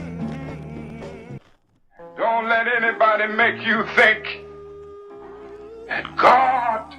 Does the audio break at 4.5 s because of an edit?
no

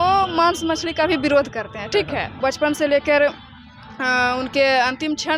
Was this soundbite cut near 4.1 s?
no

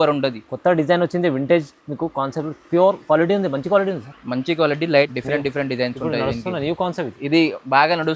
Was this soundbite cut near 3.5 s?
no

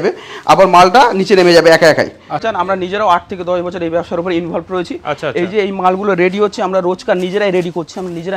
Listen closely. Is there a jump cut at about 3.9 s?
no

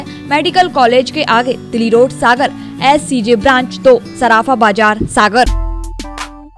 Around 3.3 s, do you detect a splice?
no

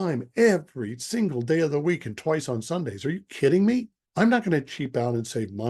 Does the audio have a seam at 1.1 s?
no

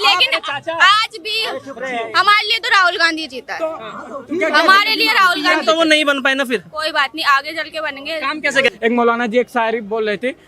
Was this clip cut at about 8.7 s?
yes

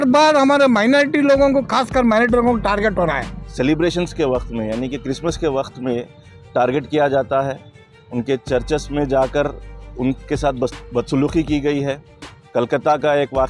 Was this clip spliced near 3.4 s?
yes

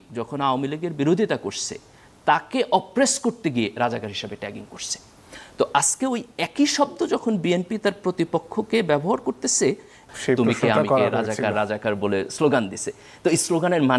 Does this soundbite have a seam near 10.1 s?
yes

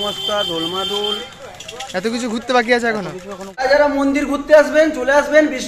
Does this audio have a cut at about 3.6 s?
yes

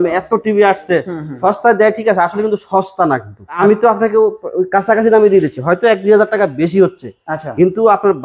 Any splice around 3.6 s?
yes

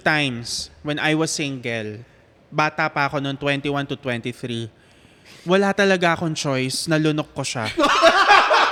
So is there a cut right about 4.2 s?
no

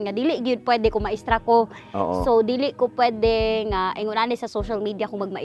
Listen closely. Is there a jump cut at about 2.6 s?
no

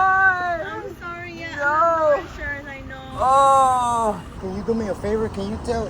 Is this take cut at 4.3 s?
yes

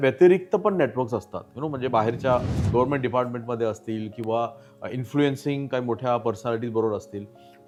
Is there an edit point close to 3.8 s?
no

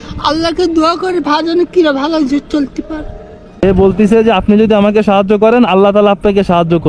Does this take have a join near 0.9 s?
no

